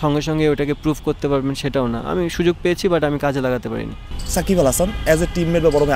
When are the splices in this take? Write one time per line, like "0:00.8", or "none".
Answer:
none

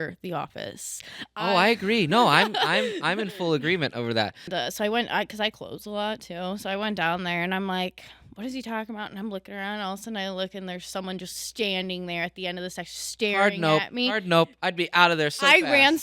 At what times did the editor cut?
0:04.5

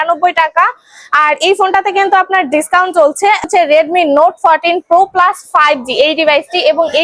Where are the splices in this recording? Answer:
0:03.4

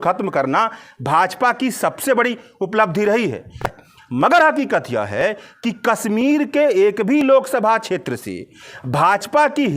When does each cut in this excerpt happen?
0:03.7

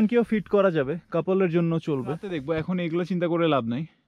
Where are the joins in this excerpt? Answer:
0:02.3

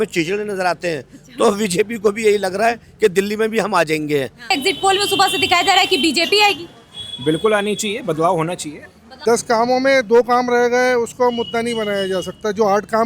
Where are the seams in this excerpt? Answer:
0:04.6
0:09.1

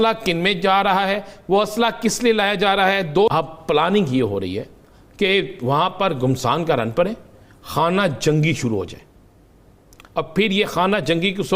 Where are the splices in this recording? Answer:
0:03.3

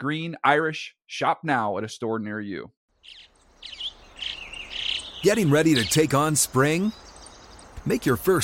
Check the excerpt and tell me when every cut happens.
0:02.7

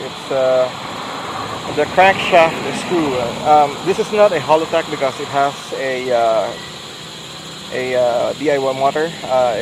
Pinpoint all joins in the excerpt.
none

